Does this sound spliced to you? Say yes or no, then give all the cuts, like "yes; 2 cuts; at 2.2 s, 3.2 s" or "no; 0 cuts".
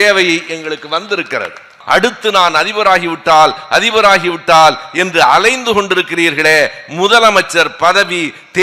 yes; 1 cut; at 1.8 s